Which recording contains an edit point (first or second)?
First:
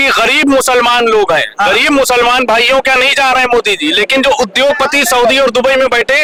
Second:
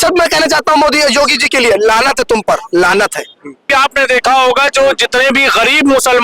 second